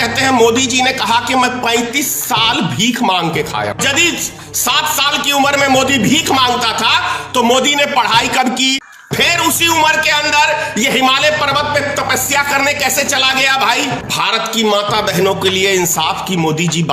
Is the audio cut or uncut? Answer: cut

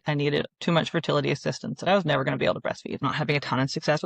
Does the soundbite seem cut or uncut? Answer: cut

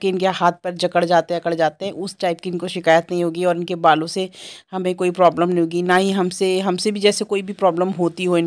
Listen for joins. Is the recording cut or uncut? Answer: uncut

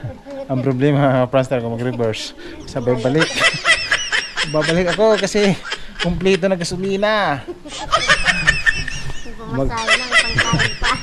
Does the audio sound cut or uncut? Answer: uncut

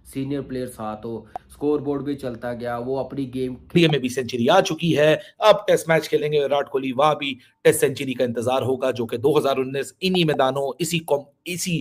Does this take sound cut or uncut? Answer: cut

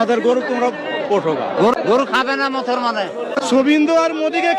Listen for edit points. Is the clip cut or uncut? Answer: uncut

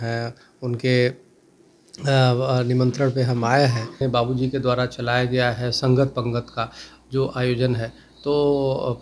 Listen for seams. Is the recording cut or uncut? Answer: cut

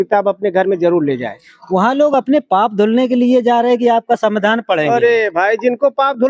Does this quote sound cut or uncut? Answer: uncut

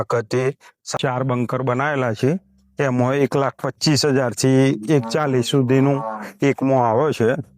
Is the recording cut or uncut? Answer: cut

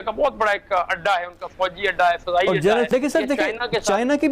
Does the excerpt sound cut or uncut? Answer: cut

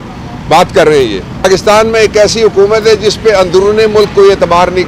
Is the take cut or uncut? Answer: cut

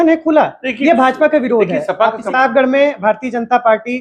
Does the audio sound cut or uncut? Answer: cut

